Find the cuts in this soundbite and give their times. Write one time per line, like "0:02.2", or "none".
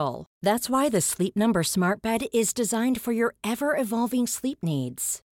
none